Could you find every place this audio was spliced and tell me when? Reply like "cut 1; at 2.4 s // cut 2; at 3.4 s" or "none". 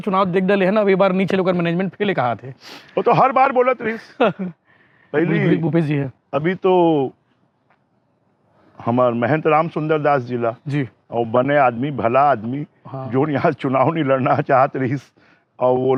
none